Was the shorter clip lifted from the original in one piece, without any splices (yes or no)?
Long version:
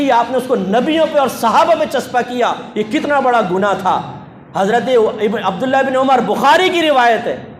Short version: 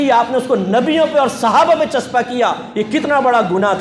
yes